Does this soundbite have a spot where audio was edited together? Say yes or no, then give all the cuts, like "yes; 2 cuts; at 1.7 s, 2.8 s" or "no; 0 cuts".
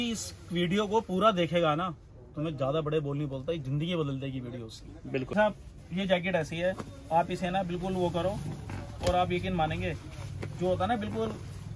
yes; 1 cut; at 5.3 s